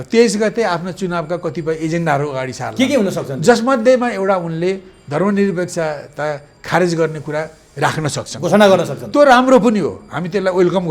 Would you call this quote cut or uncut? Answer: uncut